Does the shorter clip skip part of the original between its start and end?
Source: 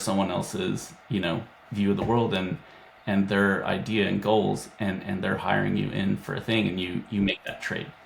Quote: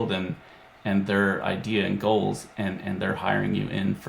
no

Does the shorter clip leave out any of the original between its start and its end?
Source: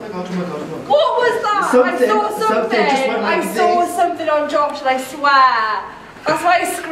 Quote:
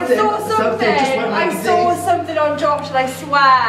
no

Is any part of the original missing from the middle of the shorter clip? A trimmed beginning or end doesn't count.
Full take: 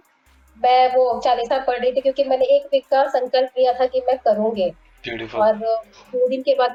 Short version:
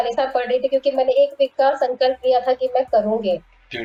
no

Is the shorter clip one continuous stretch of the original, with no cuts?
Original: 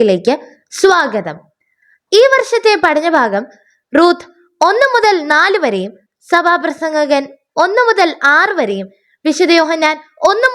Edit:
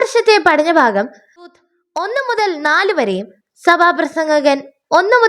no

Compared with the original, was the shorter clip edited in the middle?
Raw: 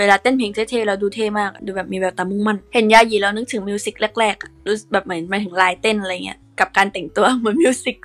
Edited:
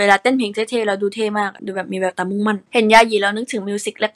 no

